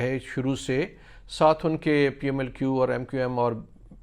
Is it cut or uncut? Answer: uncut